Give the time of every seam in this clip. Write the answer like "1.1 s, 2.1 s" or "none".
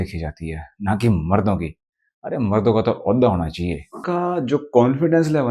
4.0 s